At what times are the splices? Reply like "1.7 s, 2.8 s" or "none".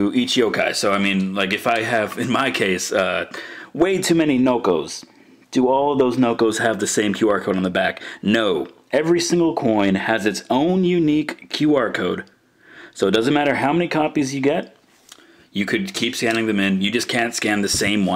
none